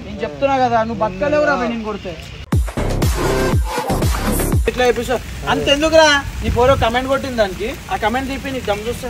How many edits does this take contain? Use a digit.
1